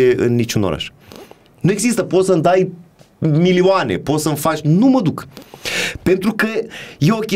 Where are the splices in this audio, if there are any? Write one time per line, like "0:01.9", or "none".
none

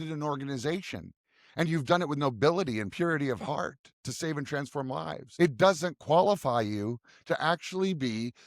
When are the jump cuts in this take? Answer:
0:05.2

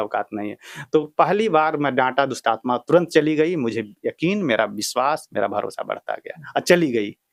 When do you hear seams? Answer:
none

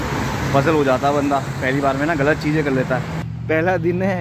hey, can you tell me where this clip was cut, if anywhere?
0:03.3

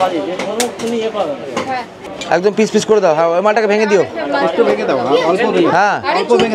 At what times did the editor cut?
none

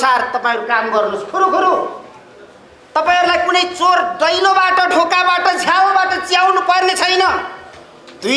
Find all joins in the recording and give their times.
none

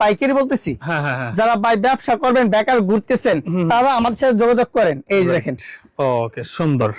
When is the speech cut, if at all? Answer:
none

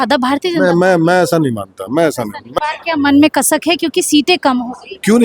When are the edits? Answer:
0:02.4

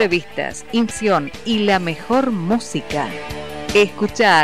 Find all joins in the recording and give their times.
0:00.9

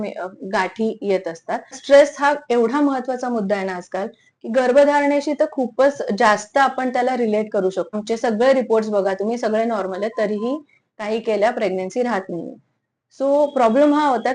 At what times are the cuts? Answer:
0:01.8
0:07.9

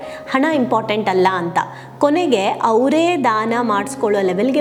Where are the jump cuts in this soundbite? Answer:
none

